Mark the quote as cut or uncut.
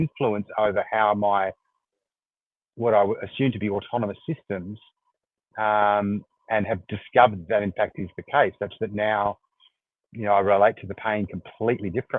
uncut